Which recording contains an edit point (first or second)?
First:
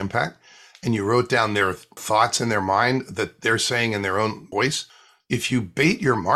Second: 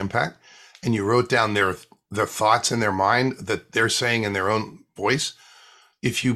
first